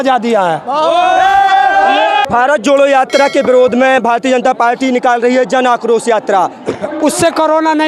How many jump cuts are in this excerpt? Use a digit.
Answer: 1